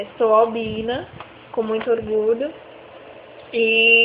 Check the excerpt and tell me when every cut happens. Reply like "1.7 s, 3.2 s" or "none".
1.0 s